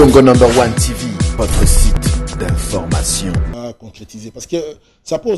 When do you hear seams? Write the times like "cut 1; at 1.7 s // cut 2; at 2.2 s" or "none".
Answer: cut 1; at 3.5 s